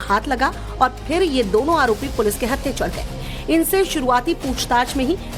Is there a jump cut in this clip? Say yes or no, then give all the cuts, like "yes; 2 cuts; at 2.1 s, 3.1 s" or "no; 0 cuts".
no; 0 cuts